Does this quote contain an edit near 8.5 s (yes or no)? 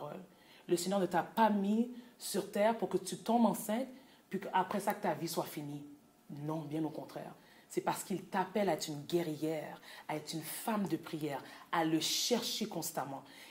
no